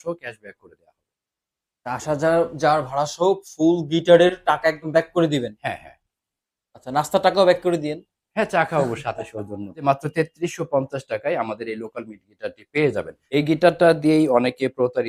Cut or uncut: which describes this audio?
cut